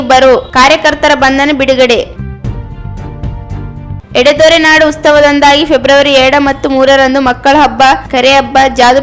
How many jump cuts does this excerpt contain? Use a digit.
2